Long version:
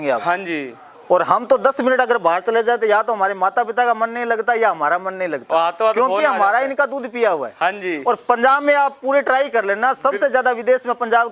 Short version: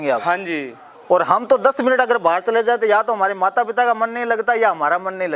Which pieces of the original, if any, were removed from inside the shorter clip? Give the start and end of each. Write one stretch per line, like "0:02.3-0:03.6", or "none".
none